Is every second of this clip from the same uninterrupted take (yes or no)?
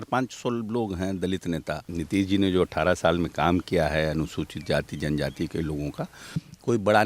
no